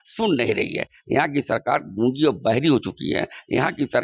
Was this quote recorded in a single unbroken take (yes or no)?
yes